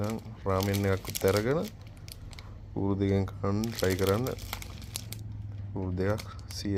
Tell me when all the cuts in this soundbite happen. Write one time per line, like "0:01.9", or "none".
none